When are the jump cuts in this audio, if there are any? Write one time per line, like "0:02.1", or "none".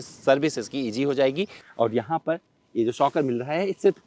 0:01.6